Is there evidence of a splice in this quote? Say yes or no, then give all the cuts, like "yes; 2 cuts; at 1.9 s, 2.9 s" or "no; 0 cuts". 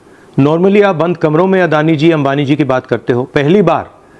no; 0 cuts